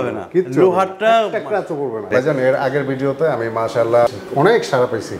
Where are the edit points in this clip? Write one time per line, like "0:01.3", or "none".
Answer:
0:02.1